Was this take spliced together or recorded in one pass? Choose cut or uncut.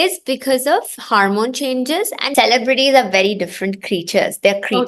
cut